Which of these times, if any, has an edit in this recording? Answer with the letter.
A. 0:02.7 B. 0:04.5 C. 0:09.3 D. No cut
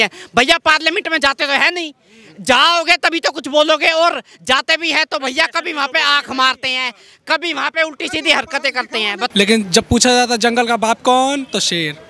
C